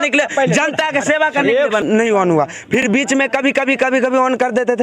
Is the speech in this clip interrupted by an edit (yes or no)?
yes